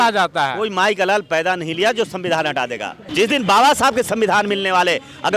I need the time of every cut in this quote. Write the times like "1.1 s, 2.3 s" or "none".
3.1 s

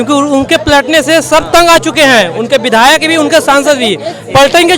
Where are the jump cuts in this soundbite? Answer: none

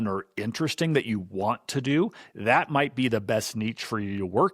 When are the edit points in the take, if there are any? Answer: none

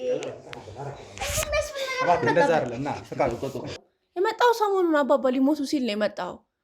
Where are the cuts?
3.7 s

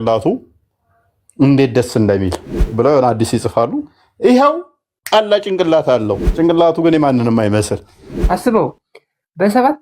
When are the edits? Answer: 6.2 s, 8.1 s

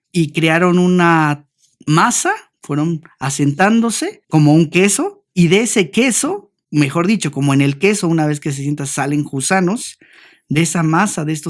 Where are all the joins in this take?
2.5 s, 4.1 s, 5.2 s

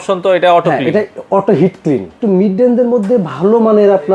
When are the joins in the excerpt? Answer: 2.2 s

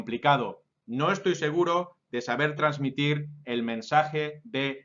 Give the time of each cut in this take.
3.6 s

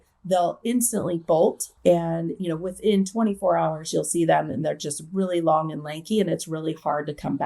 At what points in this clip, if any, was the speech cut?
1.7 s

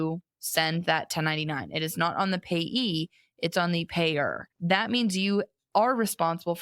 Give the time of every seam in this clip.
4.5 s

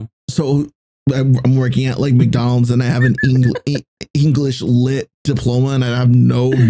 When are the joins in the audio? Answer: 5.1 s

